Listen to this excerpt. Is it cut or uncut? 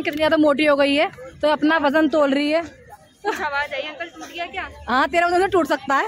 uncut